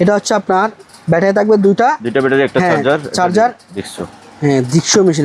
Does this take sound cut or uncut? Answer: cut